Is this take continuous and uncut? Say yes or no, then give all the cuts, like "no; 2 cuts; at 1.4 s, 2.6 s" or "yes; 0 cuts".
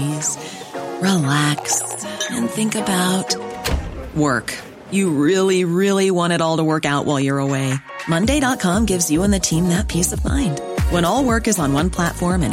yes; 0 cuts